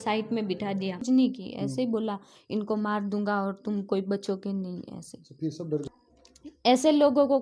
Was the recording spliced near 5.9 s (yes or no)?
yes